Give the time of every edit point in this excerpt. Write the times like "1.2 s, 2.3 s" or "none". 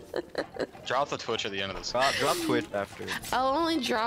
0.8 s, 3.0 s